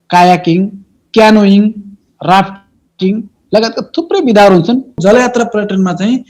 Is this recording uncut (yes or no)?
no